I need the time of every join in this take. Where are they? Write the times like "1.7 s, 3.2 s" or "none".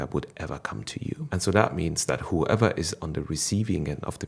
1.2 s

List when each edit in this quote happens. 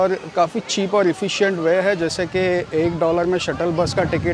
none

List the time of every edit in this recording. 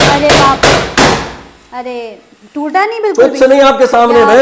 none

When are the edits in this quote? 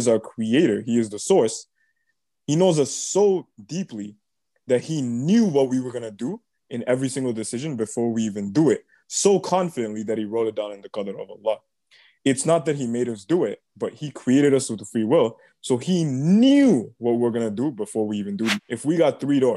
18.7 s

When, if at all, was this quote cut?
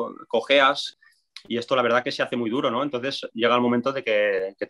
0.9 s

